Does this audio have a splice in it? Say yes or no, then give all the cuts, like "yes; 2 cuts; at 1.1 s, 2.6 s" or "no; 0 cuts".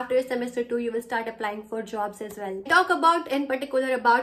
yes; 1 cut; at 2.7 s